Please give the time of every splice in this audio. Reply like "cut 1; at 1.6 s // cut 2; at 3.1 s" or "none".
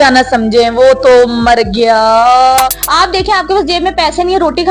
cut 1; at 2.8 s